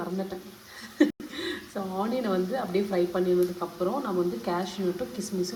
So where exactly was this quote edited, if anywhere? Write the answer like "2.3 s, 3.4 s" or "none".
none